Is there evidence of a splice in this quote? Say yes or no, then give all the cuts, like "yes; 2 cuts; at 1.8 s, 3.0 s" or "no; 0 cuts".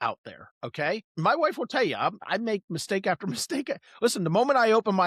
yes; 2 cuts; at 1.1 s, 2.2 s